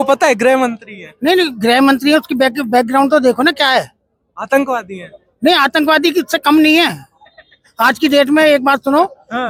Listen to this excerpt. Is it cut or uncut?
uncut